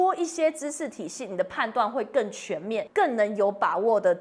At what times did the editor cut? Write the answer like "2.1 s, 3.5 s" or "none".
2.9 s